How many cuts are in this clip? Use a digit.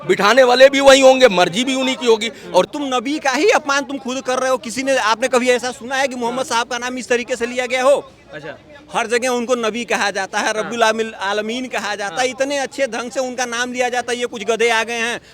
1